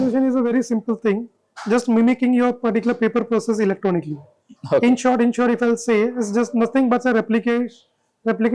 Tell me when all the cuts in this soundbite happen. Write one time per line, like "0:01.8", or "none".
none